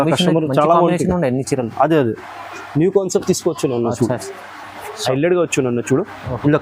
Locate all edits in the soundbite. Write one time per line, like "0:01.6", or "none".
0:05.0

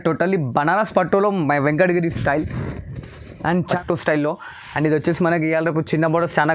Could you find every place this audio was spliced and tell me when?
0:03.7

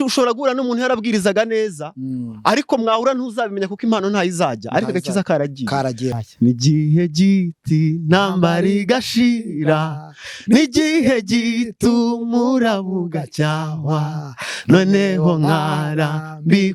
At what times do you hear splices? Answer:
0:06.2

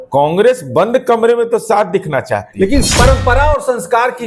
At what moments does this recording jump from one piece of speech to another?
0:02.9

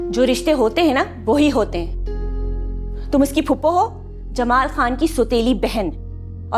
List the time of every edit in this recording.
none

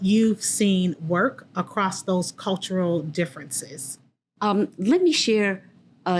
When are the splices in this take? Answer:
0:04.2

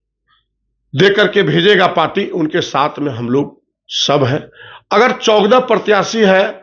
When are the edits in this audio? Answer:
none

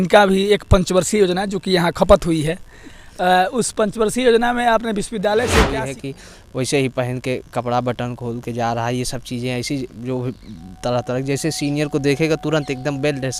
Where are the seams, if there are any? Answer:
0:05.7

